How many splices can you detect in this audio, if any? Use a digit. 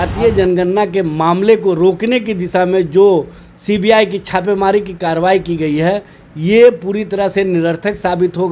0